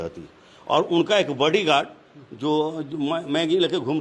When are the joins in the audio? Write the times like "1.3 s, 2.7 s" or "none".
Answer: none